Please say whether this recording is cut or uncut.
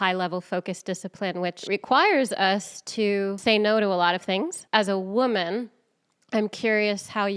cut